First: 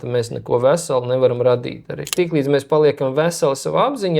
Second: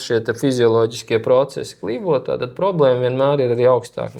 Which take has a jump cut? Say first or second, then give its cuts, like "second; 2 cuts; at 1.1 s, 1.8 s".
first; 1 cut; at 2.1 s